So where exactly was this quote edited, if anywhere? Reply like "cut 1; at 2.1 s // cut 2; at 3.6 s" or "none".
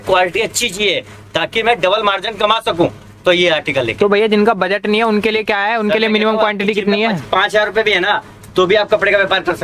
none